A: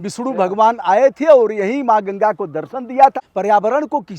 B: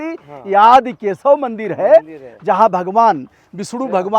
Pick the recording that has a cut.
A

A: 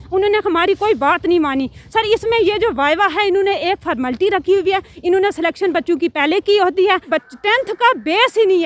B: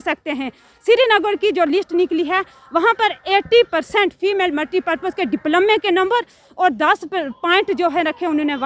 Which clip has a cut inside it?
A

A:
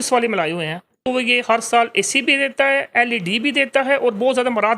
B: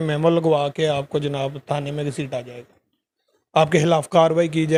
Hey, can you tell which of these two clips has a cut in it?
A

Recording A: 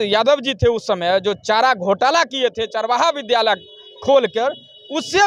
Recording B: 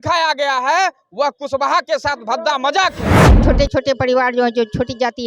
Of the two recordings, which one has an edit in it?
B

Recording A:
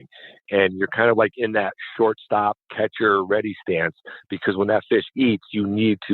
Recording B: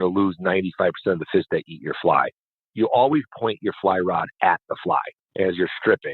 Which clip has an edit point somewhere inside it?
B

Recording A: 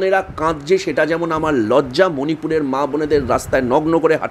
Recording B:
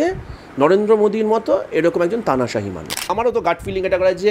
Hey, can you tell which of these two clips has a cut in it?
B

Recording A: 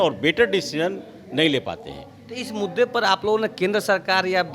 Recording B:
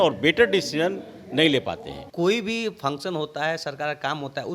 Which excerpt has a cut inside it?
B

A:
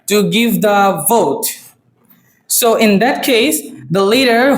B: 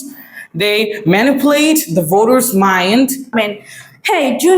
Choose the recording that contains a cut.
B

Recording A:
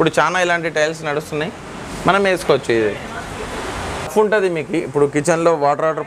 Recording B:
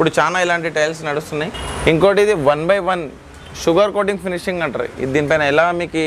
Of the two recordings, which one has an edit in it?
B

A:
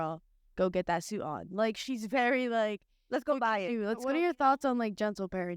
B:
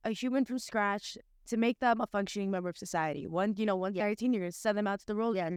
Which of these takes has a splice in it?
A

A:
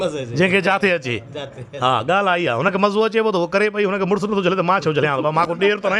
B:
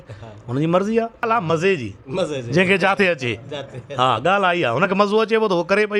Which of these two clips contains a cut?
B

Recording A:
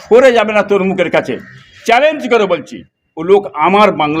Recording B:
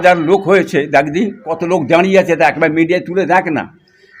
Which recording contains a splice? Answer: B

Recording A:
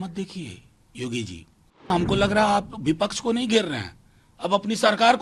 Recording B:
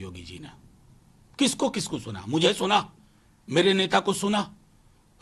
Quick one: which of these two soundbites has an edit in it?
A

